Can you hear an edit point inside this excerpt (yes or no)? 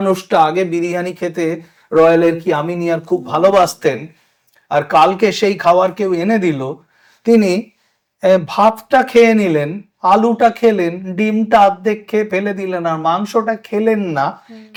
no